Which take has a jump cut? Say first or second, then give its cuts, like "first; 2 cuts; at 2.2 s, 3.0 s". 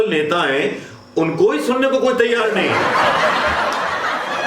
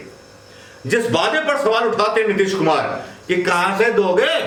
first; 1 cut; at 2.7 s